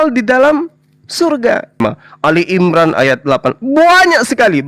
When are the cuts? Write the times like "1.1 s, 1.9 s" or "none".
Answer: 1.8 s